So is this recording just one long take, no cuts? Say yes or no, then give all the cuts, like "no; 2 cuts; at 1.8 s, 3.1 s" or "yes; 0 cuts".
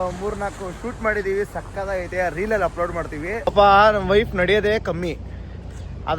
no; 1 cut; at 3.4 s